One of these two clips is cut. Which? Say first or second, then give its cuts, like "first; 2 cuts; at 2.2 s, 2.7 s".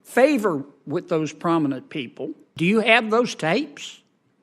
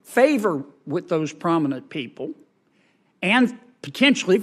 first; 1 cut; at 2.4 s